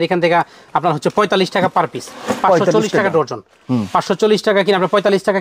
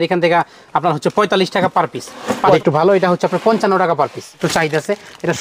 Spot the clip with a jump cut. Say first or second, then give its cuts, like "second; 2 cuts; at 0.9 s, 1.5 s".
second; 2 cuts; at 2.5 s, 4.4 s